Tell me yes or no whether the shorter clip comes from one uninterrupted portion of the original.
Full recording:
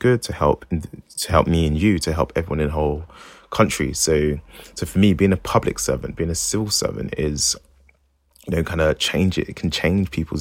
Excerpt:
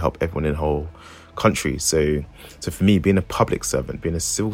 yes